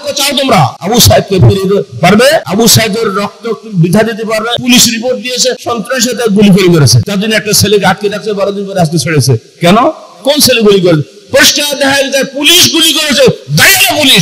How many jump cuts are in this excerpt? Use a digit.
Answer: 5